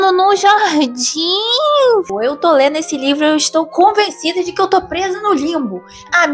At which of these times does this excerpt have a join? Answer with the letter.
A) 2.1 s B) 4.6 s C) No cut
A